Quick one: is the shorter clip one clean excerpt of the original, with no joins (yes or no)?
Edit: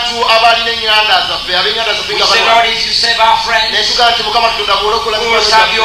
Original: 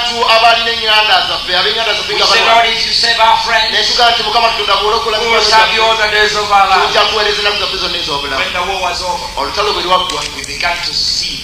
yes